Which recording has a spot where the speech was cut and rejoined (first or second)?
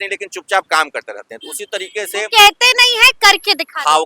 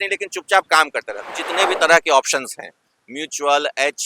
second